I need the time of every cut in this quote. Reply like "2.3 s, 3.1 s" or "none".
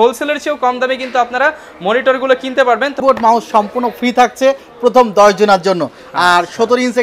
3.0 s